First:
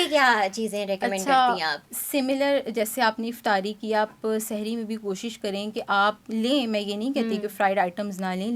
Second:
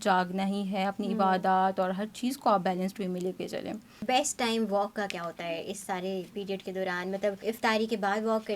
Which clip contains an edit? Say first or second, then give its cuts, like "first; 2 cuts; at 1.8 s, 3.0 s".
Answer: second; 2 cuts; at 3.9 s, 7.4 s